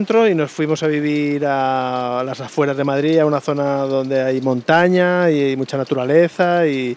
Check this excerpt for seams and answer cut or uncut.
uncut